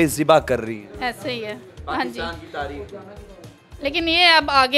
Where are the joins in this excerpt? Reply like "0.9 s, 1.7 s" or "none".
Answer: none